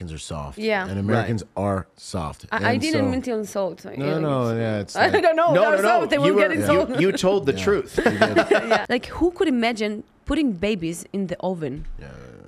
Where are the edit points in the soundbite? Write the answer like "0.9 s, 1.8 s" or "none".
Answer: 8.8 s